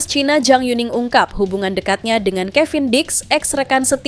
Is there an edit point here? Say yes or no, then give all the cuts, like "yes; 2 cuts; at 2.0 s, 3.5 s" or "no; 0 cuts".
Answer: no; 0 cuts